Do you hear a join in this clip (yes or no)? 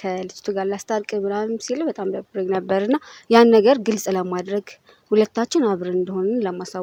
no